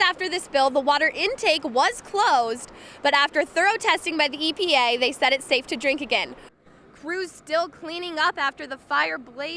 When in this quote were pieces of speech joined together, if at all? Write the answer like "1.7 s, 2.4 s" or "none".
6.5 s